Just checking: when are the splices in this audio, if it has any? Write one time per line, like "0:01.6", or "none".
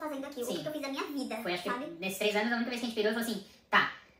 none